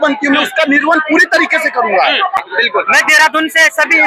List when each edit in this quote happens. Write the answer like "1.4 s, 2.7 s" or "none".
2.4 s